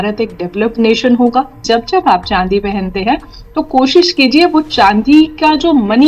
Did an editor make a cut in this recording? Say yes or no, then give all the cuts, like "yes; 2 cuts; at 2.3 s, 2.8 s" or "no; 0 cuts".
yes; 1 cut; at 1.6 s